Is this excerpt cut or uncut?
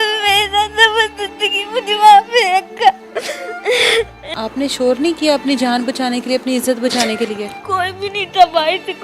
cut